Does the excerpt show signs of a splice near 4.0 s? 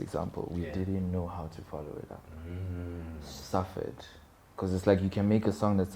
no; 0 cuts

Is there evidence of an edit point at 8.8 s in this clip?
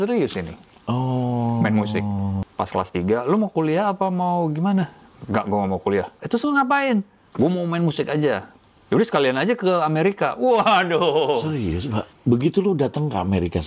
no; 3 cuts; at 2.4 s, 6.2 s, 12.1 s

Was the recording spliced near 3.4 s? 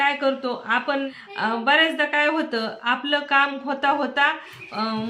no; 1 cut; at 1.1 s

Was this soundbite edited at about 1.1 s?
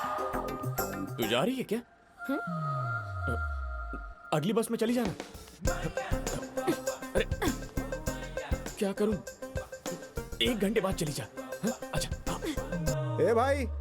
yes; 1 cut; at 1.1 s

